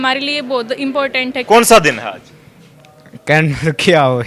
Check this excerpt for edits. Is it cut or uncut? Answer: cut